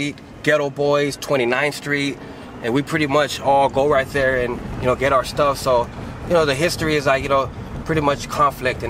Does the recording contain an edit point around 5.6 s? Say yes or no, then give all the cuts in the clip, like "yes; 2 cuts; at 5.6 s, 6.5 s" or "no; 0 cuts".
no; 0 cuts